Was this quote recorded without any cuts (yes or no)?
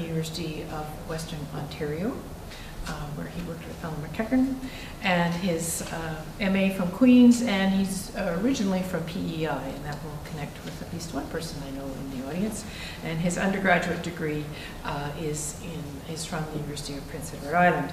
yes